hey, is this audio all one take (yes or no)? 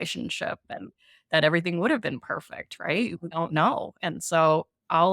no